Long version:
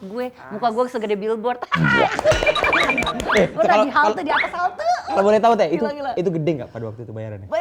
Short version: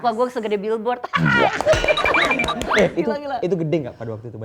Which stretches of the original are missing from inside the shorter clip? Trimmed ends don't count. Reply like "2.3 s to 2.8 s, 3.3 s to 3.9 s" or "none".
3.5 s to 5.7 s